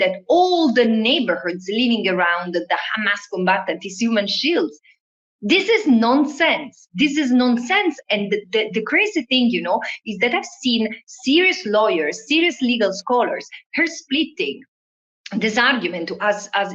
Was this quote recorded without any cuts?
yes; 0 cuts

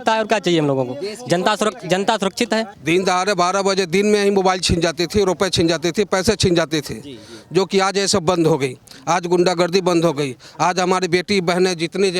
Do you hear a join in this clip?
yes; 1 cut; at 2.7 s

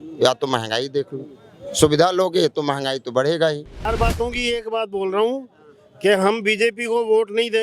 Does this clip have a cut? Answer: yes; 1 cut; at 3.9 s

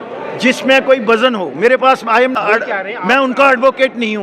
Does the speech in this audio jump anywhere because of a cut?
yes; 1 cut; at 2.4 s

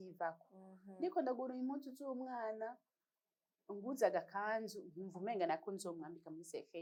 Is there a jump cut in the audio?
no; 0 cuts

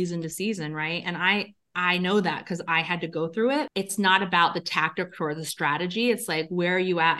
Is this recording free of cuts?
no; 1 cut; at 3.7 s

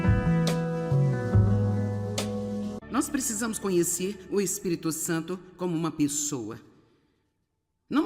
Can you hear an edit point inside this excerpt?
yes; 1 cut; at 2.8 s

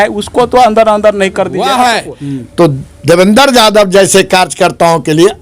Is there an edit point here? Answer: yes; 1 cut; at 1.7 s

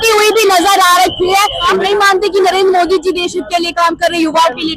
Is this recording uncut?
no; 1 cut; at 1.6 s

